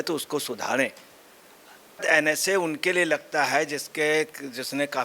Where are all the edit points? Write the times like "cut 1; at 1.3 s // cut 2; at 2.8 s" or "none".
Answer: cut 1; at 2.0 s